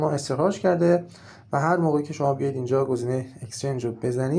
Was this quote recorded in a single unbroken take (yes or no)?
yes